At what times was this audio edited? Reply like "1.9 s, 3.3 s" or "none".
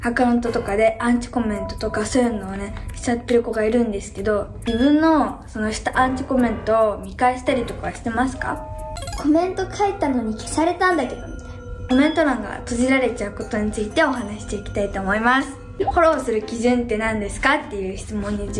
4.6 s, 9.1 s, 11.9 s, 15.9 s